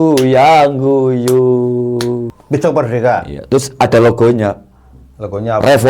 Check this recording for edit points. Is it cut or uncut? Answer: cut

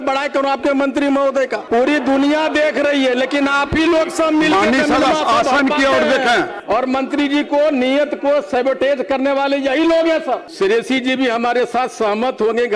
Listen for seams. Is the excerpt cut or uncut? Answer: cut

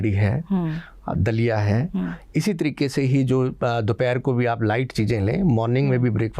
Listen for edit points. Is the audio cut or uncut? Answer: uncut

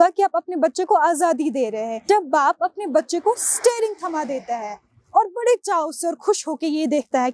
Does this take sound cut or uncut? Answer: cut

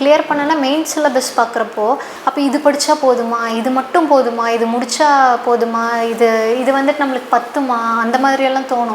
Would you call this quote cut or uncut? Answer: cut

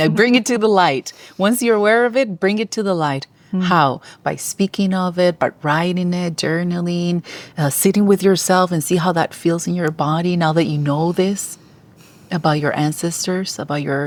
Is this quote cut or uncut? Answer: uncut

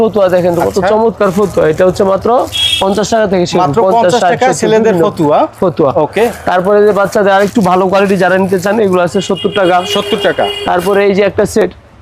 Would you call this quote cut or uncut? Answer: uncut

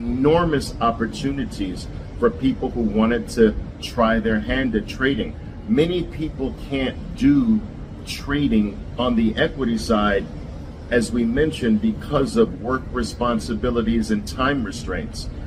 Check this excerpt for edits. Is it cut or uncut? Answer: uncut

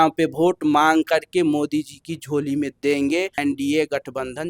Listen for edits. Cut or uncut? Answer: cut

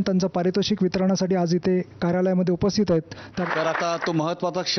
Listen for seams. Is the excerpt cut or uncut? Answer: cut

